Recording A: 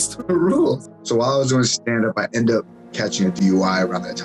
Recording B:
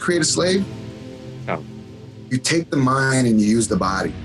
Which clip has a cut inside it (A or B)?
A